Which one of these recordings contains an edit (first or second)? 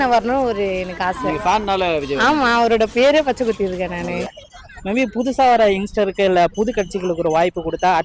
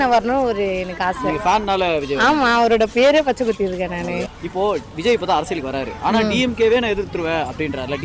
first